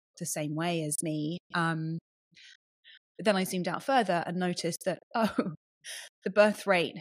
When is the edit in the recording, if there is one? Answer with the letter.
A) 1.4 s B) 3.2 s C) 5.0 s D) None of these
B